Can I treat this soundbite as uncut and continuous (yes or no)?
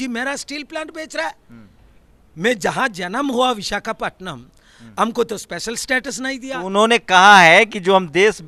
yes